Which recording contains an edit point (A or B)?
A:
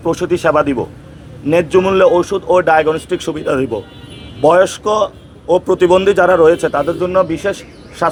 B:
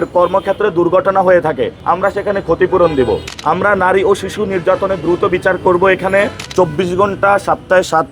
B